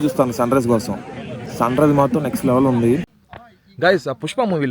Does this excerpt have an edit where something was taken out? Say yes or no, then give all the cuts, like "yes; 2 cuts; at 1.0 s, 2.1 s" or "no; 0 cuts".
yes; 1 cut; at 3.1 s